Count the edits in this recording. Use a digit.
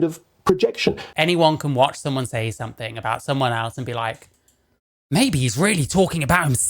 1